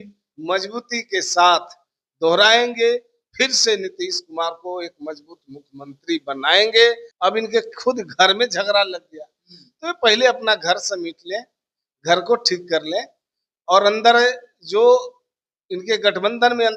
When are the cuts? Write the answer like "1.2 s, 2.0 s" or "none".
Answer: 7.1 s